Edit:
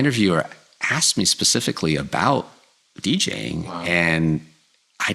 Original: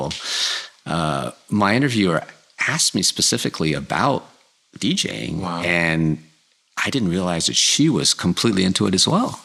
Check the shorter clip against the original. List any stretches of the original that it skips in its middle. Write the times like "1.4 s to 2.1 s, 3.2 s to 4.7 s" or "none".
none